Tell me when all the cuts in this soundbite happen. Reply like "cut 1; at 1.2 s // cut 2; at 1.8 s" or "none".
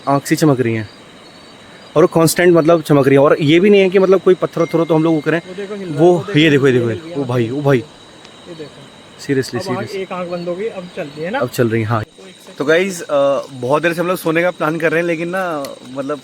cut 1; at 12.0 s